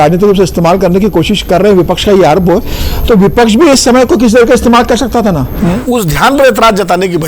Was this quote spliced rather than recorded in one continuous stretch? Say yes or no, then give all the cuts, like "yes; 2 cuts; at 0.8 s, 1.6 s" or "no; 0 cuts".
yes; 1 cut; at 5.5 s